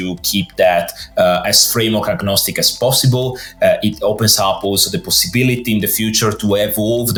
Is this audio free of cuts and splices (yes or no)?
yes